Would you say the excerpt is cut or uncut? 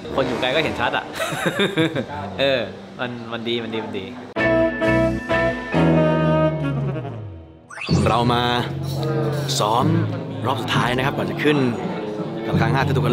uncut